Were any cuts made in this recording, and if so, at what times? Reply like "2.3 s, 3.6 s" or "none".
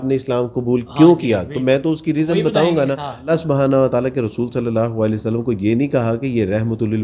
3.3 s

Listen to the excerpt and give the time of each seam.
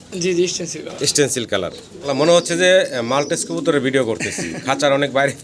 1.9 s

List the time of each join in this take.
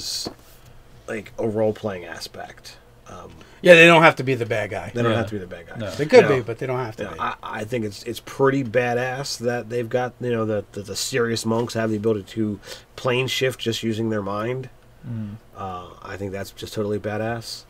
8.7 s

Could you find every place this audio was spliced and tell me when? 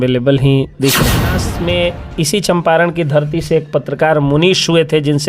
1.5 s

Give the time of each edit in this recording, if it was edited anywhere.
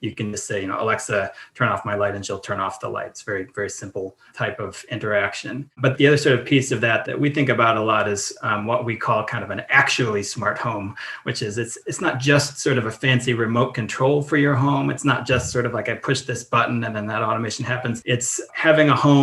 18.0 s

